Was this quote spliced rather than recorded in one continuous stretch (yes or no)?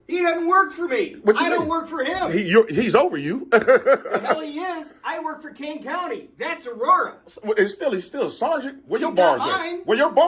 no